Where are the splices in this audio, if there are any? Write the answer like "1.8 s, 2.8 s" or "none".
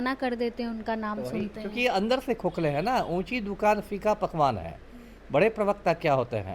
none